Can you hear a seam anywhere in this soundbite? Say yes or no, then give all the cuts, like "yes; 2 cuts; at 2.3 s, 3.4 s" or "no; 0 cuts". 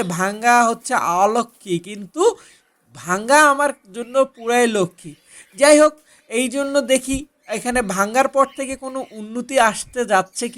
no; 0 cuts